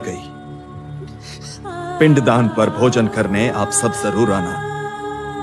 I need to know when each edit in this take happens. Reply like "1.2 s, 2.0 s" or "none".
none

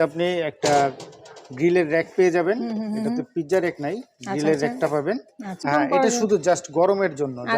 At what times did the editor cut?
5.6 s

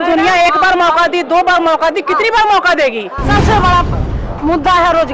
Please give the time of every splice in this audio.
3.2 s

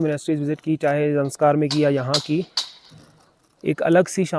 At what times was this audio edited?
none

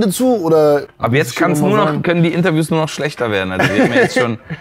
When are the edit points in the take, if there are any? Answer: 0.9 s

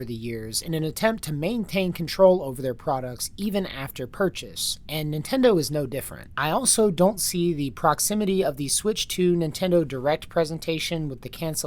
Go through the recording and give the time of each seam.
6.2 s

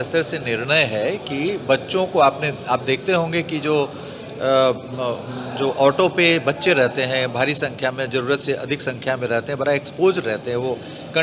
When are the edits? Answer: none

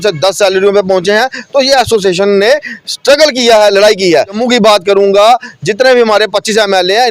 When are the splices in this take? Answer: 4.4 s

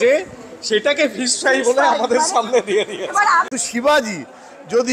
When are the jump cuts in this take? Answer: 3.2 s

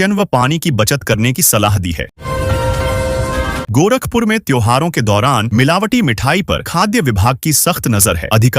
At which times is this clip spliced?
2.2 s, 3.6 s

